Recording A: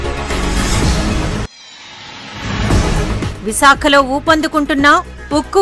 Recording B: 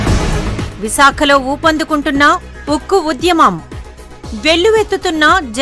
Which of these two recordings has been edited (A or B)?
A